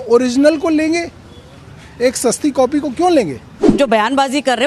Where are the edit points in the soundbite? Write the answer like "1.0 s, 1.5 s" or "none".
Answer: 3.7 s